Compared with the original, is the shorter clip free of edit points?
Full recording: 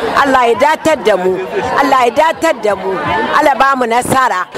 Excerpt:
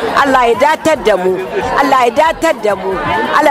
yes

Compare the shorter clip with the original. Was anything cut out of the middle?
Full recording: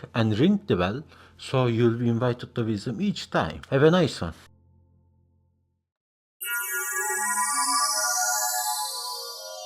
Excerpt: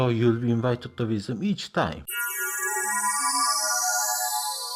yes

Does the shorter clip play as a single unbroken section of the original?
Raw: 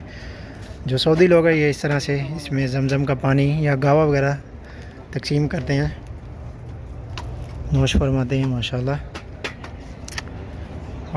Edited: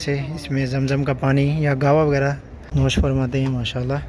no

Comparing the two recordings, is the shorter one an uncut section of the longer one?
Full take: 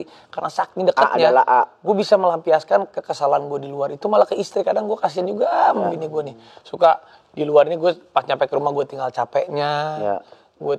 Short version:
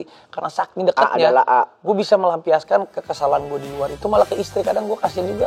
yes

